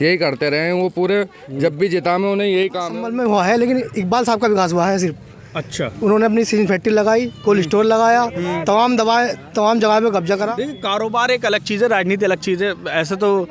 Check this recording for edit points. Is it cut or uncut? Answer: cut